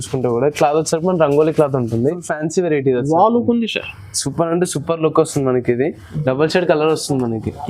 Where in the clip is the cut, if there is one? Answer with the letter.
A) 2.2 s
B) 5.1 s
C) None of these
A